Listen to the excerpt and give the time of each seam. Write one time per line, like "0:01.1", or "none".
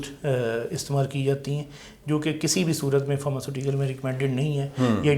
none